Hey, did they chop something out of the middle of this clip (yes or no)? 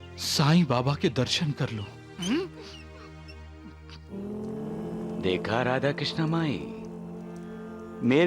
no